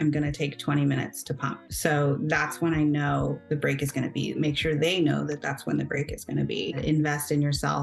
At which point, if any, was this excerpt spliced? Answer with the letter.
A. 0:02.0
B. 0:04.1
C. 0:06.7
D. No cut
C